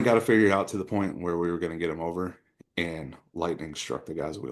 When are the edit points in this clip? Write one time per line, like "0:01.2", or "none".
none